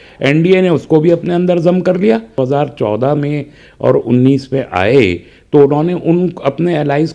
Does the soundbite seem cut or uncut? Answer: cut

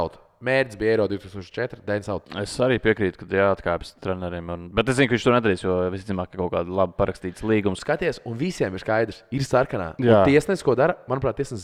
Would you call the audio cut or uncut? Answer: cut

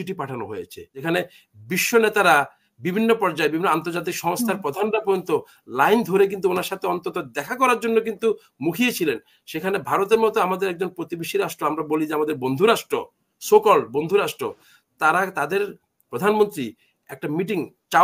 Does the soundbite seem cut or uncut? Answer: cut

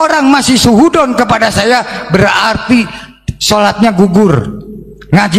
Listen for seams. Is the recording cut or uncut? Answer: uncut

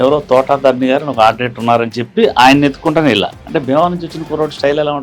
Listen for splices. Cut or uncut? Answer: cut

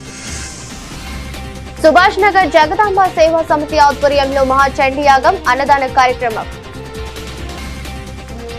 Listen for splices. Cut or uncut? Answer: uncut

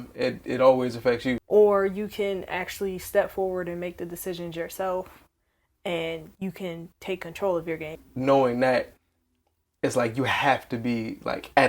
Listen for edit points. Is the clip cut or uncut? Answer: cut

